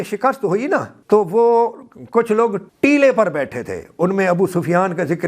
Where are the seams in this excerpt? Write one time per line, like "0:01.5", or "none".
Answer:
0:00.9
0:02.6